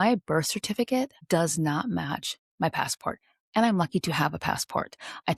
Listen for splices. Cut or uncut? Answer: cut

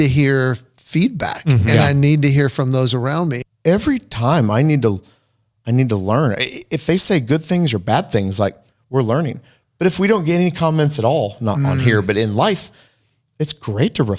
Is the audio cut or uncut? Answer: cut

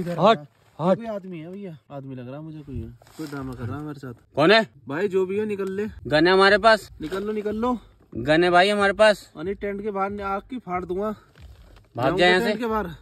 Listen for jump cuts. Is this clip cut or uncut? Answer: cut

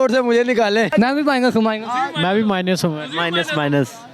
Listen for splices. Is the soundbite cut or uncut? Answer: cut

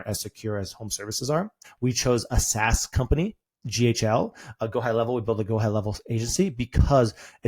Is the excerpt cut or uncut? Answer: cut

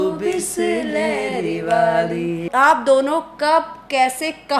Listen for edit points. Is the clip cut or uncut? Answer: cut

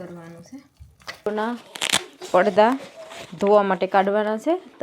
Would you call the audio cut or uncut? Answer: cut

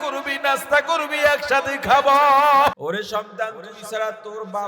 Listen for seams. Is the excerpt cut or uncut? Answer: cut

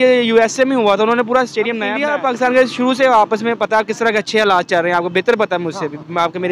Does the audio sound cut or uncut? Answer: cut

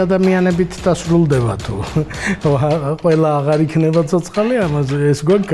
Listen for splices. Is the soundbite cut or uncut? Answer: uncut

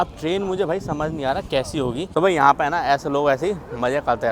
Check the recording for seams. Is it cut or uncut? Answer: cut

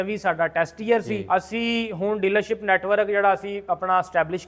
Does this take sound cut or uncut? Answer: cut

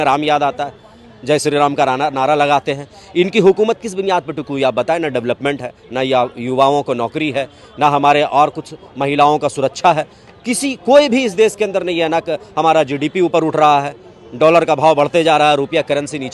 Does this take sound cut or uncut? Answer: uncut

